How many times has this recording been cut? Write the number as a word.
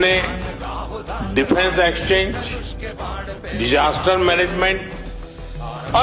zero